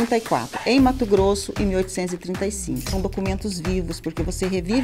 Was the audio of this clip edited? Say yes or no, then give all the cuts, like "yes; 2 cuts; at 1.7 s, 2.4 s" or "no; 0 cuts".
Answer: yes; 1 cut; at 2.9 s